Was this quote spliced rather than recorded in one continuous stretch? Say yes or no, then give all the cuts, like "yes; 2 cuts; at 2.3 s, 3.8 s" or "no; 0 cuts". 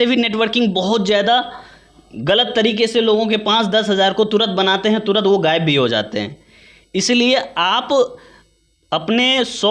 no; 0 cuts